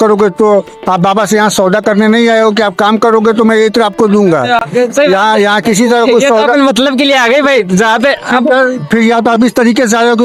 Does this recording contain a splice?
no; 0 cuts

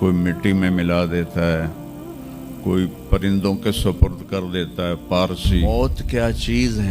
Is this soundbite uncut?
no; 1 cut; at 5.6 s

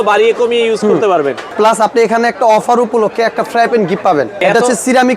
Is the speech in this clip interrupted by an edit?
yes; 2 cuts; at 1.4 s, 4.4 s

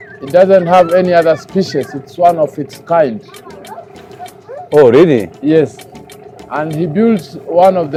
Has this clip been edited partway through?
no; 0 cuts

